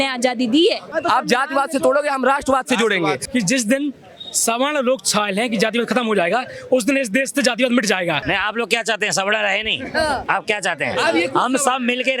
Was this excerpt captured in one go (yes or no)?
no